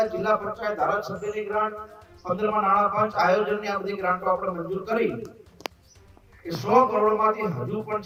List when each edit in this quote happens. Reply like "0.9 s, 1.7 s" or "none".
none